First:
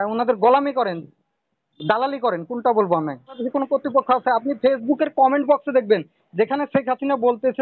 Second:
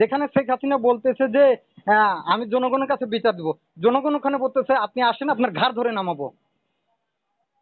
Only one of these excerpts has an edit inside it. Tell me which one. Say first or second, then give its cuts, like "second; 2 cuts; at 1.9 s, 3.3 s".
first; 1 cut; at 3.4 s